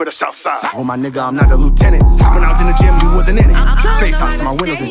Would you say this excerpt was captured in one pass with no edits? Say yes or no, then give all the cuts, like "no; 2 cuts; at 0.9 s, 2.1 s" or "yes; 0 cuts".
yes; 0 cuts